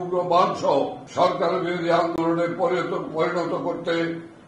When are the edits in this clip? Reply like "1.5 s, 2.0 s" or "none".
1.0 s